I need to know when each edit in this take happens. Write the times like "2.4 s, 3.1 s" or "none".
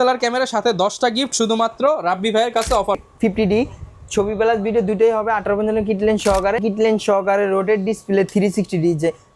3.0 s, 6.6 s

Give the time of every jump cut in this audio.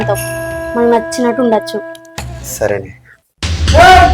3.0 s

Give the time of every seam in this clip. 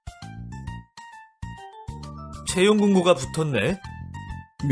2.1 s

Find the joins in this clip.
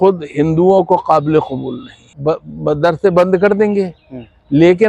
2.1 s

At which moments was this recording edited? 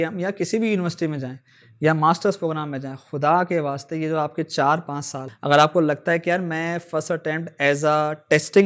5.2 s

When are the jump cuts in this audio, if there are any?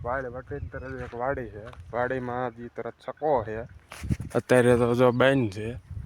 none

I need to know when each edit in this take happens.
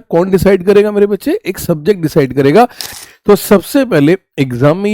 2.8 s

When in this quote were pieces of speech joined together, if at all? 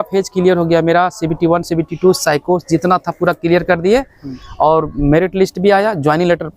none

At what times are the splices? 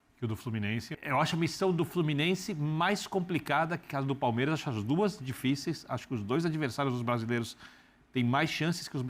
0.9 s

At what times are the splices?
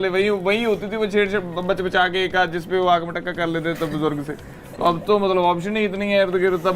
none

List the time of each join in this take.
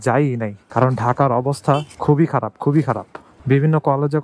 none

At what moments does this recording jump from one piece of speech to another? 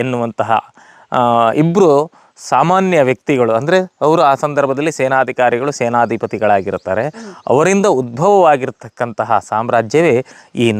none

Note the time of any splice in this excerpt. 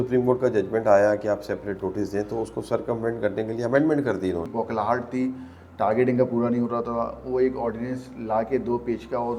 4.5 s

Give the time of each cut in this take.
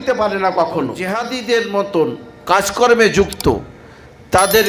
1.0 s

